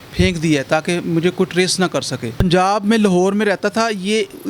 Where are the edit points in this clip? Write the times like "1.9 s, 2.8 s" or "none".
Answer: 2.4 s